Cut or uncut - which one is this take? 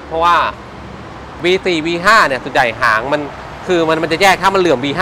cut